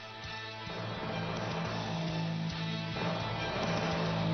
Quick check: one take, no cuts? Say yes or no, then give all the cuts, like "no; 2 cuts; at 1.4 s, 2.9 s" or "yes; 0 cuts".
no; 2 cuts; at 1.0 s, 3.0 s